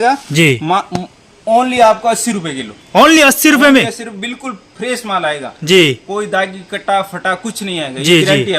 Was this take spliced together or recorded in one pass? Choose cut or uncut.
uncut